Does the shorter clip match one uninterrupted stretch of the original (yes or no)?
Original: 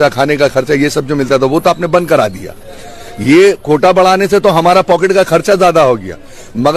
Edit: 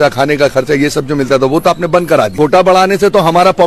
no